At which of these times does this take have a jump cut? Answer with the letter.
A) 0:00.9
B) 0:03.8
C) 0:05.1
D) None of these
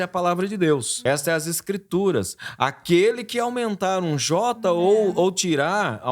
A